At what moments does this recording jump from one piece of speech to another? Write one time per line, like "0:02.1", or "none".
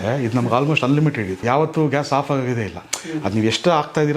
0:01.4